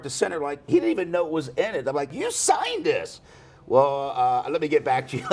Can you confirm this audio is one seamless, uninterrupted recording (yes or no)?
no